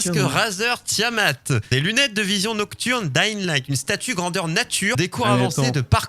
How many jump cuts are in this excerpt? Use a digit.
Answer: 2